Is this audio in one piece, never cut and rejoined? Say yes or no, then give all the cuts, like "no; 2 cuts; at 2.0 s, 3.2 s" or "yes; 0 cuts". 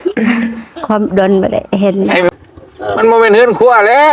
no; 1 cut; at 2.3 s